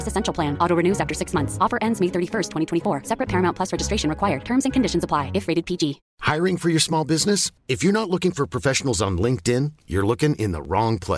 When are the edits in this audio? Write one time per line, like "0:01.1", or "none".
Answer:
0:06.1